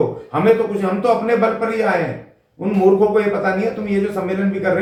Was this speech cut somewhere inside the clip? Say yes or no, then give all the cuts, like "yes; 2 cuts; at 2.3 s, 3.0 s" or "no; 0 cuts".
no; 0 cuts